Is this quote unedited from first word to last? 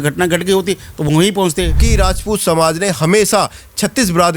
no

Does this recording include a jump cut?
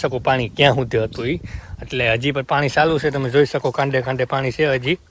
no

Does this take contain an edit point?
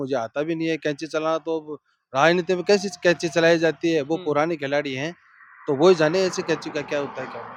no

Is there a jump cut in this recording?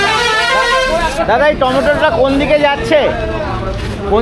no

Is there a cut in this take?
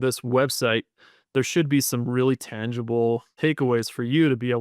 yes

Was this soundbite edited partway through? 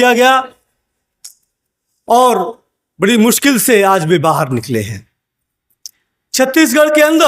no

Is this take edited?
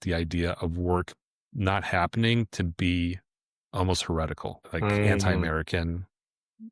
yes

